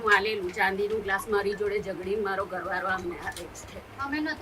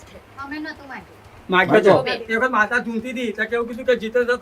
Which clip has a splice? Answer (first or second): second